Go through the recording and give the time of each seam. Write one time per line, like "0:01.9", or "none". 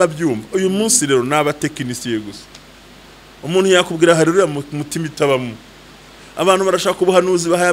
none